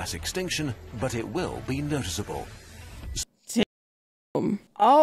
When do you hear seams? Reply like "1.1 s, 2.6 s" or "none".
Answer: none